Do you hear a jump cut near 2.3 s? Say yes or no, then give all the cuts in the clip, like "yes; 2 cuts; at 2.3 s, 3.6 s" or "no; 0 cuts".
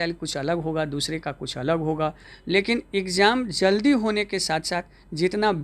yes; 1 cut; at 2.3 s